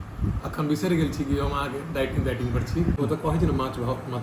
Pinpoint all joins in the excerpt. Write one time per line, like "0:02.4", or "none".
0:03.0